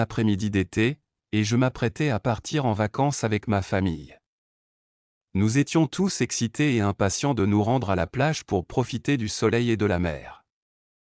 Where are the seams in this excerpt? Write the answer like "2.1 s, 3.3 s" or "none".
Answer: none